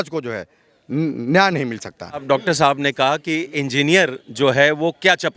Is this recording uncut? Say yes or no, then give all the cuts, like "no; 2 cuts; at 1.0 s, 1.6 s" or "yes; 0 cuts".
no; 1 cut; at 2.2 s